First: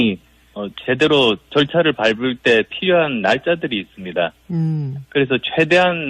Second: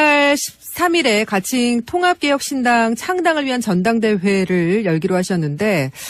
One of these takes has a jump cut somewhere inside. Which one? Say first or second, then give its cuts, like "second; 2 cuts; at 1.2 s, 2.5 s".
first; 1 cut; at 2.5 s